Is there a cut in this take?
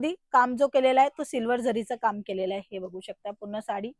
no; 0 cuts

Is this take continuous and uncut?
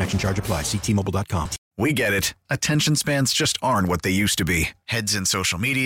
no; 1 cut; at 1.6 s

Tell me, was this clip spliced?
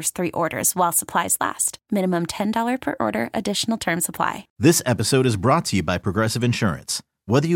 yes; 1 cut; at 4.5 s

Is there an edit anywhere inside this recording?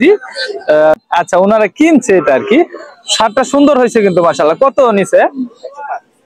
yes; 1 cut; at 1.0 s

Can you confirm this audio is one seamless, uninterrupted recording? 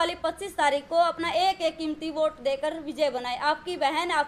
yes; 0 cuts

